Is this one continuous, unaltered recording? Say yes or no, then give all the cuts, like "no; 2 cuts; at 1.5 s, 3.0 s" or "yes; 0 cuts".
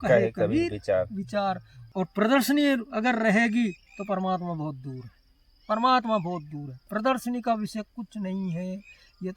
no; 1 cut; at 1.8 s